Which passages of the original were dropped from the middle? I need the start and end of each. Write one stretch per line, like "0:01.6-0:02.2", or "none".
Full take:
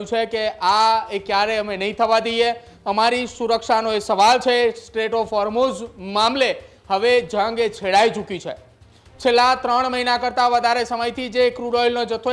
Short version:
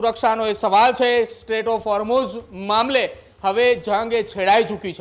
none